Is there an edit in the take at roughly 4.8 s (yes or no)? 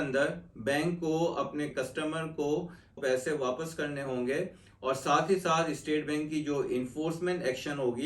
no